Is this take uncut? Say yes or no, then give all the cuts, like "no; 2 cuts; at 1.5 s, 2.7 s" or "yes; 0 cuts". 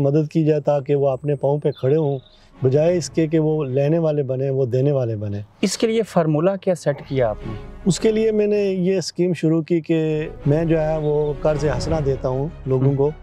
no; 1 cut; at 10.3 s